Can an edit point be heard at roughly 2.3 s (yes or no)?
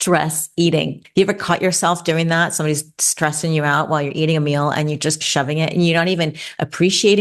no